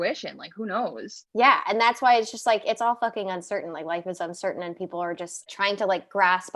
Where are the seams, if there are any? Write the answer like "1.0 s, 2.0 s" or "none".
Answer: 1.1 s, 5.5 s